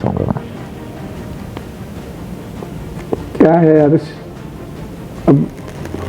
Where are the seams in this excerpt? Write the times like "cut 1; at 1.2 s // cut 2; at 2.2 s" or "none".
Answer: cut 1; at 1.2 s